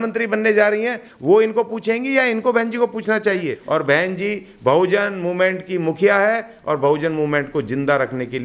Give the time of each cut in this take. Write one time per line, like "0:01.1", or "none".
0:03.6